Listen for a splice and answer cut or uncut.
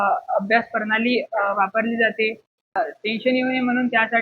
cut